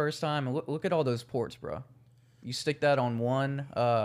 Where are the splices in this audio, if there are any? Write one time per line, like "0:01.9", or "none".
none